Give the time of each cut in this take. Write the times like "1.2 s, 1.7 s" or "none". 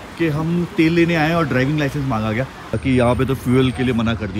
2.8 s